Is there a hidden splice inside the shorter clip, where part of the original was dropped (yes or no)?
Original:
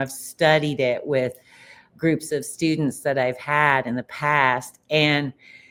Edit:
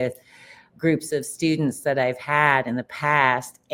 no